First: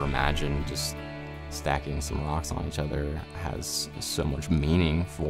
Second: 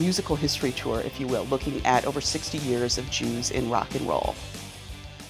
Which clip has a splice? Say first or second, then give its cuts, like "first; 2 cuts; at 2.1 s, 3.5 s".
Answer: second; 1 cut; at 4.4 s